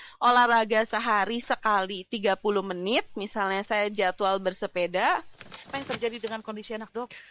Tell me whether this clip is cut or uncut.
cut